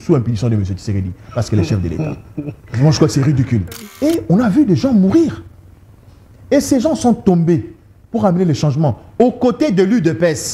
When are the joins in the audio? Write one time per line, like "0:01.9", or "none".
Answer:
0:03.7